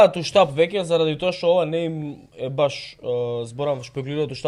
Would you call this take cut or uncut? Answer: uncut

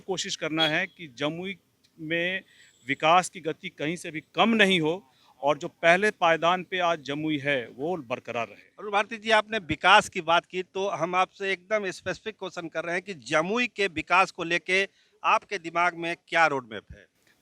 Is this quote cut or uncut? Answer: uncut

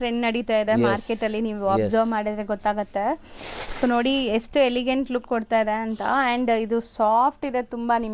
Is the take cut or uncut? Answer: uncut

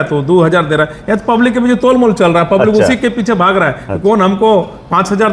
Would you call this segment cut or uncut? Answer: uncut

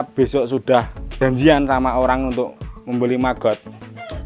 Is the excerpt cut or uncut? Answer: cut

